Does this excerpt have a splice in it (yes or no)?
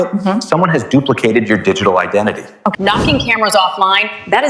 yes